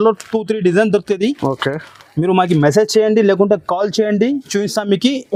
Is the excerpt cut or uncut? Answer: uncut